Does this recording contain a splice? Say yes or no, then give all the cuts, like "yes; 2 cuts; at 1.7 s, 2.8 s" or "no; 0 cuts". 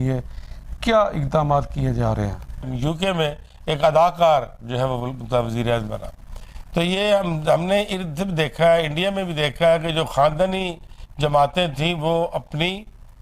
yes; 1 cut; at 2.7 s